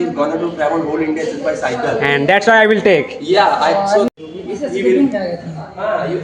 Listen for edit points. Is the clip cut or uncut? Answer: uncut